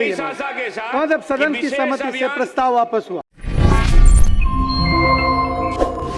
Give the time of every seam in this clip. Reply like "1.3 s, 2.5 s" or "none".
none